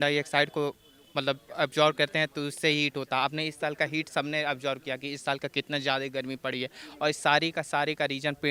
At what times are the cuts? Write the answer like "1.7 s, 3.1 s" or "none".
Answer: none